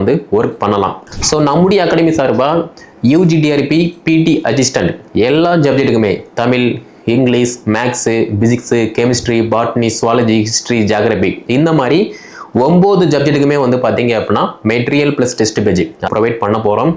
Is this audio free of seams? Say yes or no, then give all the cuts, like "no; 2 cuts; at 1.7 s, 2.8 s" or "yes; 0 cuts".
no; 2 cuts; at 1.0 s, 16.1 s